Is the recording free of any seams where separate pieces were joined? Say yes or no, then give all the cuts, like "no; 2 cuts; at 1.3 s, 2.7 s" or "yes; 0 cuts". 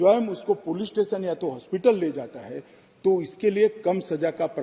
yes; 0 cuts